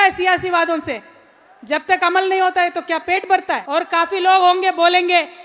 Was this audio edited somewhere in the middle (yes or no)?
yes